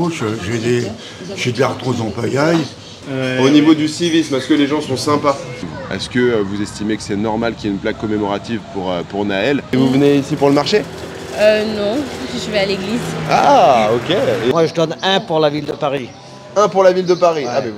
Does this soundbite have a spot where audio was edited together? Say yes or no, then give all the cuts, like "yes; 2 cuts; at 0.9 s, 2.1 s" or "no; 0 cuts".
yes; 4 cuts; at 3.1 s, 5.6 s, 9.7 s, 14.5 s